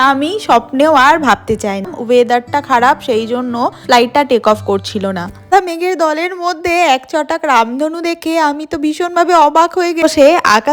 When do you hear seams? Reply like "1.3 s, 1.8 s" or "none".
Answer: 2.0 s, 5.5 s, 10.0 s